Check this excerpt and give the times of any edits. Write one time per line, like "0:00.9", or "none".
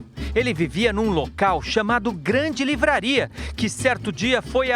none